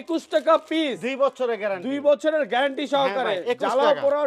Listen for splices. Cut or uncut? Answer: uncut